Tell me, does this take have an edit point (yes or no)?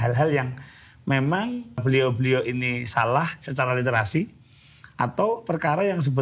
yes